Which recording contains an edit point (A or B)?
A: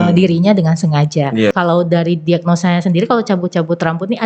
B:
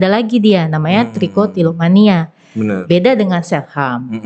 A